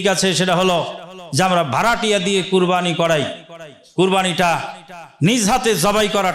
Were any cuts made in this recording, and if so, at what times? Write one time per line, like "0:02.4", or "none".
none